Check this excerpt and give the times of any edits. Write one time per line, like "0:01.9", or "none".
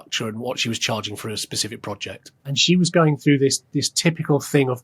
0:02.6

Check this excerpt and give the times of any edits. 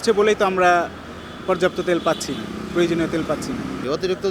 none

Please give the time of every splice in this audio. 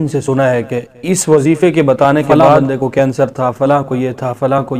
0:02.4

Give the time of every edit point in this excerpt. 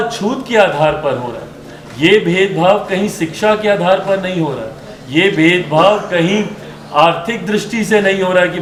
none

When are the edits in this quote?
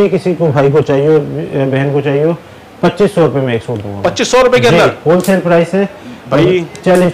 none

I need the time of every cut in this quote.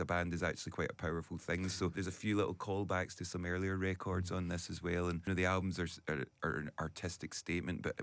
0:02.0
0:05.2

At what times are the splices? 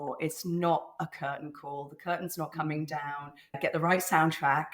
0:03.6

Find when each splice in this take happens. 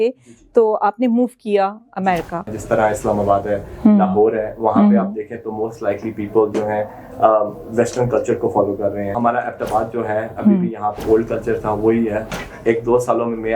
0:02.5
0:09.2
0:11.0
0:12.3

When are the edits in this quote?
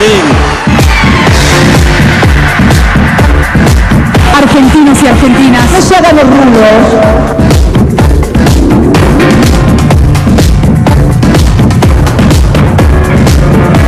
none

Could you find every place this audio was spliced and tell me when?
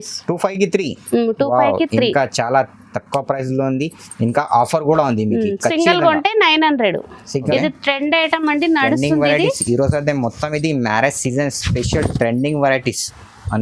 0:07.5

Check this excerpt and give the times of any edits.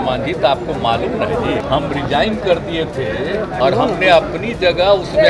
0:01.6
0:03.5

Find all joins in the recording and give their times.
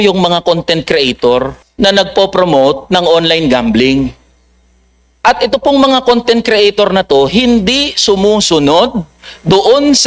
0:01.6

